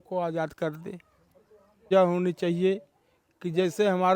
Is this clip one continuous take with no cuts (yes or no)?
no